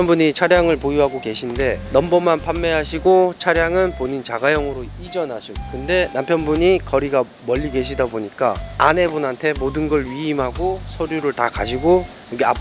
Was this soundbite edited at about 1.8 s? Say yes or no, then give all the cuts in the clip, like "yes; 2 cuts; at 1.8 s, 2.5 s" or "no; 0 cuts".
yes; 1 cut; at 1.8 s